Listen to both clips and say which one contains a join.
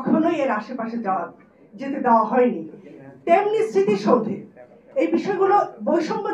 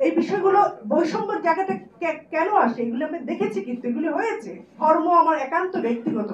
second; 1 cut; at 4.8 s

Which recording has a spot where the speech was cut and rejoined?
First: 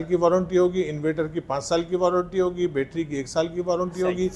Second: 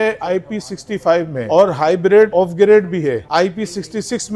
second; 2 cuts; at 1.4 s, 2.3 s

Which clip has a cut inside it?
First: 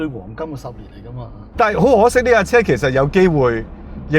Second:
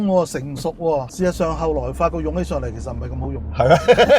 first; 1 cut; at 1.4 s

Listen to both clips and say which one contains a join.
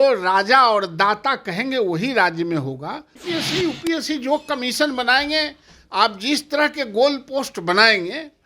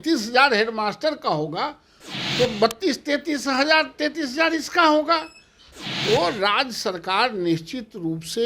first; 1 cut; at 3.1 s

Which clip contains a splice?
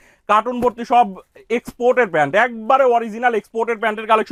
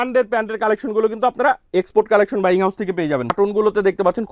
second; 1 cut; at 3.3 s

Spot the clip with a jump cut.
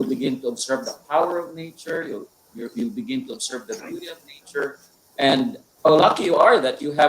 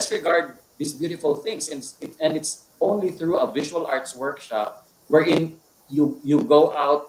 first; 1 cut; at 5.6 s

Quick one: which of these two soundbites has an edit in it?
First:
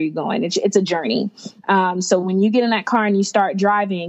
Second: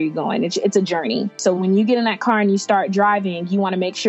second; 1 cut; at 1.4 s

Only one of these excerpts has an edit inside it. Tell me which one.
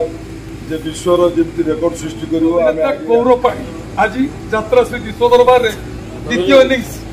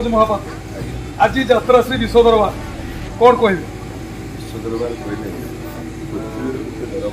first; 1 cut; at 3.0 s

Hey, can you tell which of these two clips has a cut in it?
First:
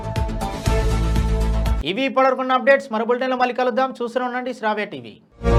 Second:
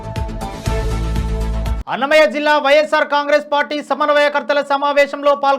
second; 1 cut; at 1.8 s

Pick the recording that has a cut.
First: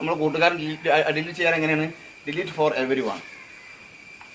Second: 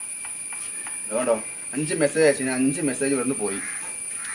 second; 1 cut; at 1.1 s

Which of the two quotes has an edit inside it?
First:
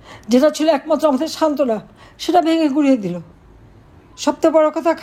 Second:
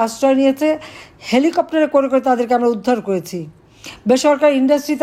first; 1 cut; at 4.1 s

